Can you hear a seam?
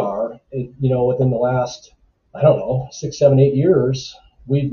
no; 0 cuts

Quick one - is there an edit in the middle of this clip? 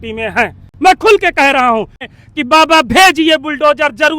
yes; 1 cut; at 2.1 s

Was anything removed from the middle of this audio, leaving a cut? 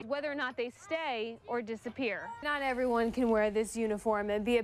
no; 0 cuts

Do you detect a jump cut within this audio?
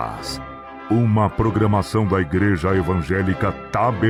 no; 0 cuts

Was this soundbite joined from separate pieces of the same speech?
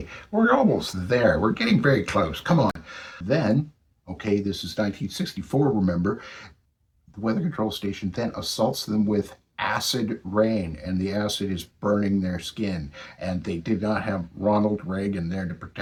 no; 0 cuts

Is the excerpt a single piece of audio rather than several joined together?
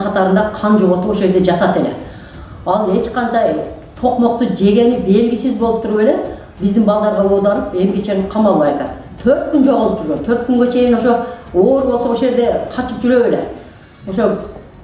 yes; 0 cuts

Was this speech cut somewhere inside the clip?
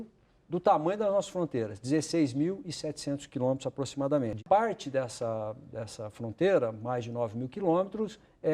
yes; 1 cut; at 4.4 s

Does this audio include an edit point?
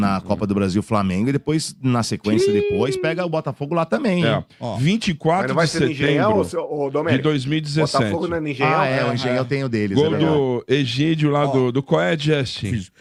no; 0 cuts

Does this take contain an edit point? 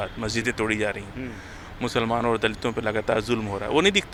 no; 0 cuts

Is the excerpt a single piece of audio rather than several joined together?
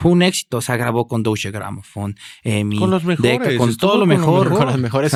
yes; 0 cuts

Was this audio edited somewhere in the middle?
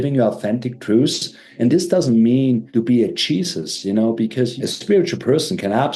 yes; 3 cuts; at 1.5 s, 2.7 s, 4.6 s

